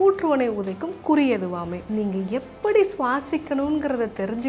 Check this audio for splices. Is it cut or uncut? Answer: cut